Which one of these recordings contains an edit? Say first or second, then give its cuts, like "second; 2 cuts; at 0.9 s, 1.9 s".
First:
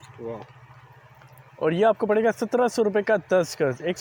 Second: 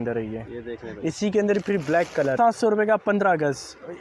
second; 1 cut; at 2.3 s